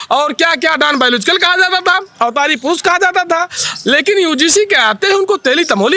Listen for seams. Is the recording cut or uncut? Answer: uncut